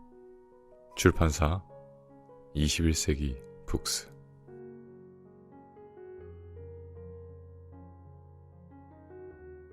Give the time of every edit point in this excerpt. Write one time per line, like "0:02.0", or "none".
0:03.8